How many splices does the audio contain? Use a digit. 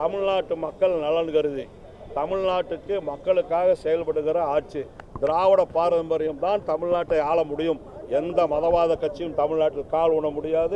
0